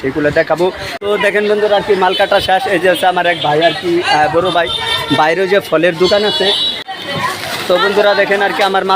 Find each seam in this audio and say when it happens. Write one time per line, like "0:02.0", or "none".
0:00.9
0:06.8